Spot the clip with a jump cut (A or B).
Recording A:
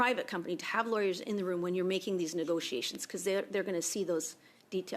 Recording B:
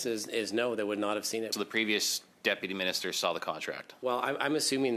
B